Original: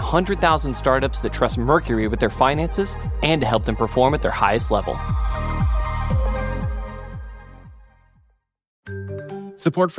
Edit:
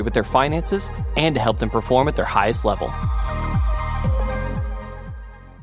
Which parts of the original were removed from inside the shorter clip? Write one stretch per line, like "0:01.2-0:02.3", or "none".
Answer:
none